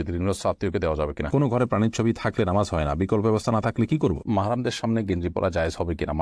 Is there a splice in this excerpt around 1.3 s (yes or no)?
yes